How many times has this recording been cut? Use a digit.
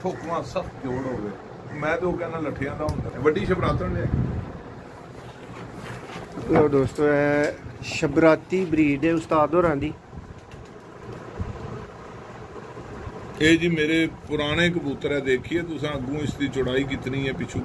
1